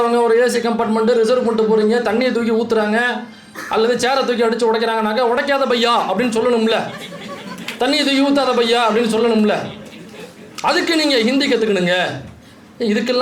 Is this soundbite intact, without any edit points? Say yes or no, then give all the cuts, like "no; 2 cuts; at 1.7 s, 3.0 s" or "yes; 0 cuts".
yes; 0 cuts